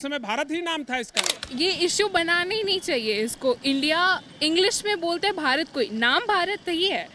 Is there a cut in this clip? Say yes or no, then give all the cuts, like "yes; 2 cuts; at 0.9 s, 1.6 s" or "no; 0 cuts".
yes; 1 cut; at 1.4 s